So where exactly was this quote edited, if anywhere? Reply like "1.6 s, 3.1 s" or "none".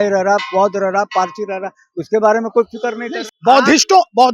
3.1 s